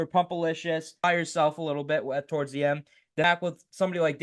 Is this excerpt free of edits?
no; 2 cuts; at 1.0 s, 3.2 s

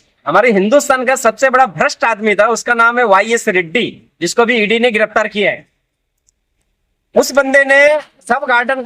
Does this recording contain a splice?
no; 0 cuts

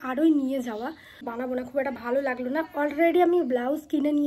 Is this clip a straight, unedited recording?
no; 1 cut; at 1.3 s

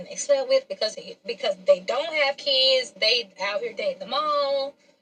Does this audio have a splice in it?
no; 0 cuts

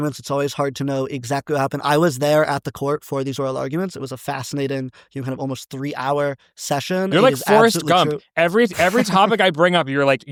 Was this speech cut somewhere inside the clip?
no; 0 cuts

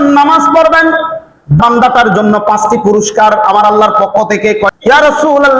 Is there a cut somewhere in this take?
yes; 2 cuts; at 1.6 s, 4.8 s

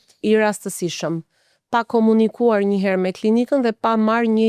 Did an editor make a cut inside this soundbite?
no; 0 cuts

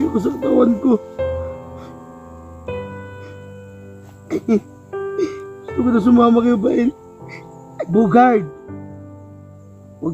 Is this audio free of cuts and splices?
no; 3 cuts; at 1.0 s, 2.8 s, 4.1 s

